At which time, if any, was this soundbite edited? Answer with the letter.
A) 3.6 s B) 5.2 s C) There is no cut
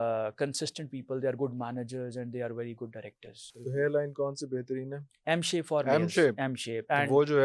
A